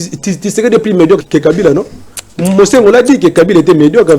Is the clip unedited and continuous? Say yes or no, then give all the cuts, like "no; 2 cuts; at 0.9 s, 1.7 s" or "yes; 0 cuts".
no; 1 cut; at 1.2 s